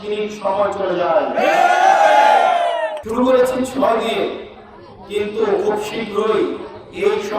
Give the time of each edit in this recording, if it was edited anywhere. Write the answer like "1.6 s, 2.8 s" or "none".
3.0 s

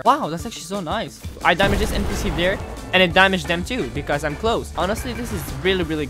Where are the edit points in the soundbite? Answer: 1.4 s, 4.7 s

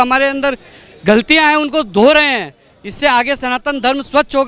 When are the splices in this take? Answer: none

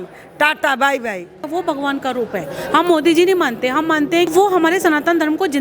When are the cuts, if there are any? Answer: 1.4 s, 4.3 s

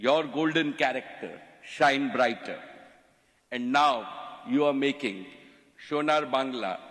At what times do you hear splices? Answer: none

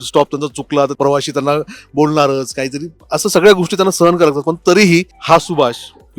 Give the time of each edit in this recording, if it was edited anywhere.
0.9 s, 5.1 s

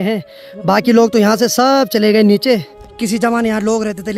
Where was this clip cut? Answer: 2.9 s

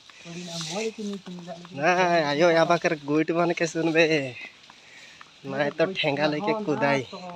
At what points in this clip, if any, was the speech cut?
none

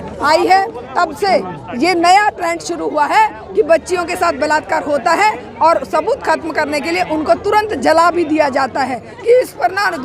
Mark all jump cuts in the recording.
9.1 s

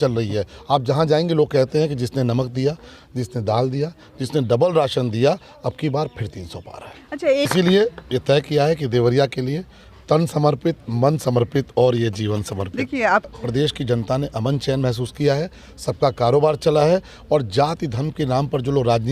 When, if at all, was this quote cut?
7.5 s, 13.3 s

